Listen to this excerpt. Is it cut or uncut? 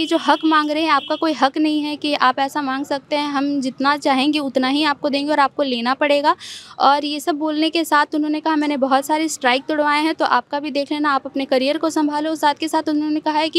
uncut